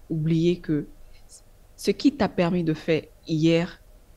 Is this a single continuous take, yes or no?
yes